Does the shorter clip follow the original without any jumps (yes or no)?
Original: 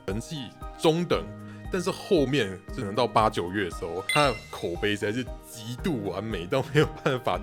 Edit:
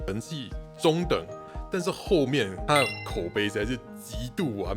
no